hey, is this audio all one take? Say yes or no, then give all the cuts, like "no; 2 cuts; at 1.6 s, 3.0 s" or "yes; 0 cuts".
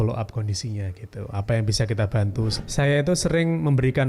no; 1 cut; at 2.6 s